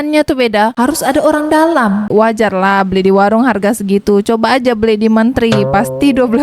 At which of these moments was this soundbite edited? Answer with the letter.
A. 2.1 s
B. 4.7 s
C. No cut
A